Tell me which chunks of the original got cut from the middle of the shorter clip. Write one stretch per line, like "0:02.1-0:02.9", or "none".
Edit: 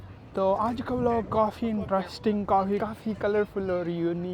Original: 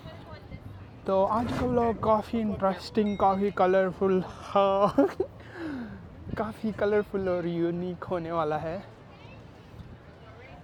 0:03.5-0:06.4